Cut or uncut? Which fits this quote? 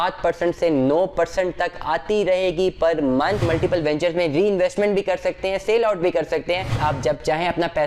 cut